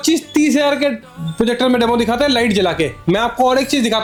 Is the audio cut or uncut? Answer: uncut